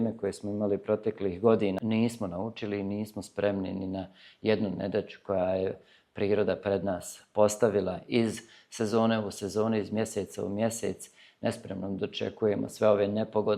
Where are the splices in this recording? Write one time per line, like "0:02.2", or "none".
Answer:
0:01.8